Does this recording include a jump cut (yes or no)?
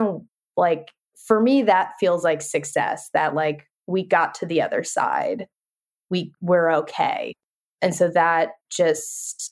yes